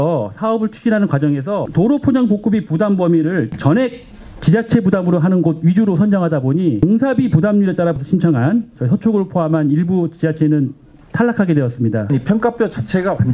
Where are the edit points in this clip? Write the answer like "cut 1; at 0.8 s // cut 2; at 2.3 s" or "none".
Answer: cut 1; at 1.7 s // cut 2; at 3.5 s // cut 3; at 6.8 s // cut 4; at 8.0 s // cut 5; at 12.1 s